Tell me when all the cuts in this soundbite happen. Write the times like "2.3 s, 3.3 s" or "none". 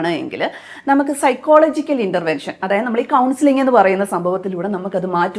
none